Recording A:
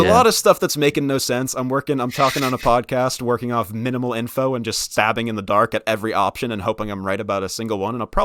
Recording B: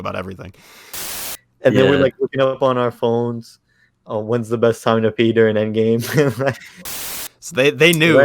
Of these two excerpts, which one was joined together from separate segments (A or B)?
B